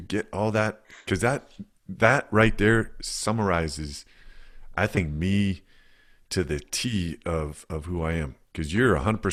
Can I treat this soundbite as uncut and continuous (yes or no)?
yes